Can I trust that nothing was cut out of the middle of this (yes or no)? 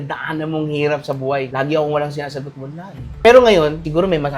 no